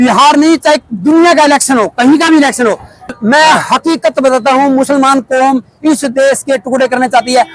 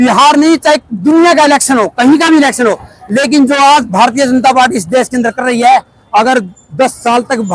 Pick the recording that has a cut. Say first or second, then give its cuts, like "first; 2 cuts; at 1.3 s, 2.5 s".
first; 1 cut; at 3.1 s